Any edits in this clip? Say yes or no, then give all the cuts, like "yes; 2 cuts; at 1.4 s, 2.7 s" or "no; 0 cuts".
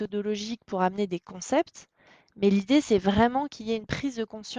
no; 0 cuts